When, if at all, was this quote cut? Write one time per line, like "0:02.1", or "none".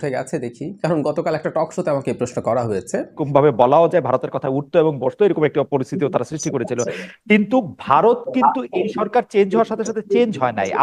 0:03.2